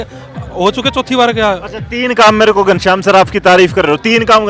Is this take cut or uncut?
uncut